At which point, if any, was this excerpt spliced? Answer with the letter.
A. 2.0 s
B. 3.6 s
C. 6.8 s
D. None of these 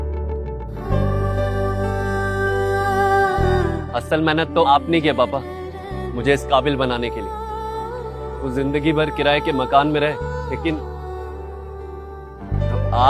B